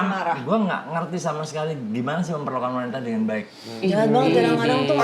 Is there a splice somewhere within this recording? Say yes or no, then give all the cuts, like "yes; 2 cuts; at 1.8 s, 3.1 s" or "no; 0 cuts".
yes; 1 cut; at 3.6 s